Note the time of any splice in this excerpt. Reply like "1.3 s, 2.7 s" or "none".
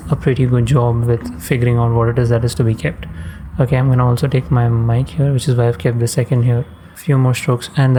none